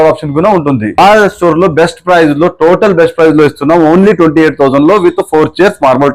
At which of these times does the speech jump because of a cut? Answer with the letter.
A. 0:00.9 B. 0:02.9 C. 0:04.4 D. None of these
A